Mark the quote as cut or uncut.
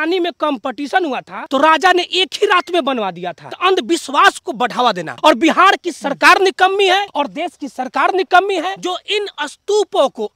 cut